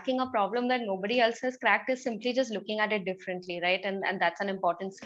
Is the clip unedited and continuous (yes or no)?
yes